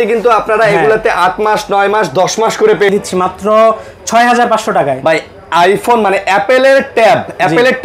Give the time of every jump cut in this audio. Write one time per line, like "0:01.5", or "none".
0:02.9